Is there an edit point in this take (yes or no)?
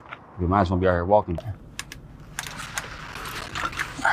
yes